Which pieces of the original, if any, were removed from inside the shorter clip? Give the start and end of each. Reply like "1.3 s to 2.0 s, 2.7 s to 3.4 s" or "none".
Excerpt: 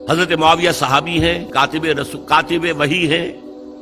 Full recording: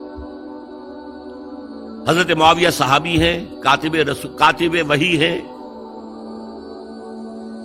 3.4 s to 3.5 s